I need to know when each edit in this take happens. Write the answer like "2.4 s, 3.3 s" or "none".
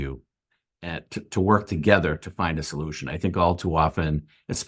none